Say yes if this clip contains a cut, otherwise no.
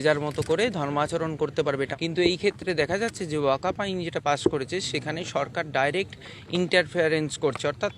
yes